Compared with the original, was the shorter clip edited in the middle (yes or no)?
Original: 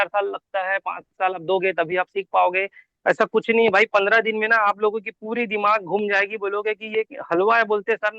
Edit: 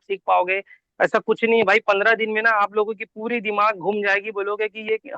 no